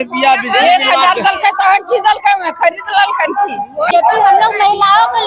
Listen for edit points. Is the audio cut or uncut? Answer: cut